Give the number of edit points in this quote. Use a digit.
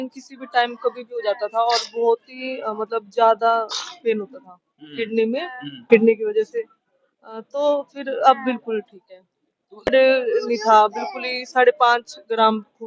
1